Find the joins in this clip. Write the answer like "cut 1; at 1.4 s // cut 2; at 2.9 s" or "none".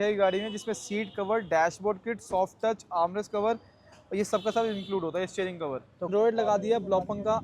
cut 1; at 6.1 s

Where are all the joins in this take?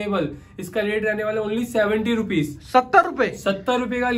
none

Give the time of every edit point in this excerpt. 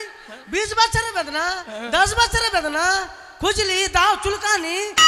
none

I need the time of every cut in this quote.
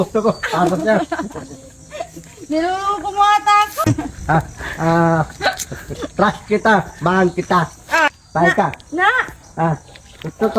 cut 1; at 3.8 s // cut 2; at 8.2 s

